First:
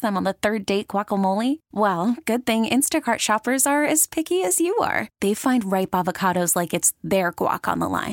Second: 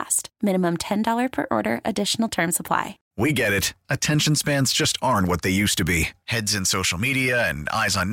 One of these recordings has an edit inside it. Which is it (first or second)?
second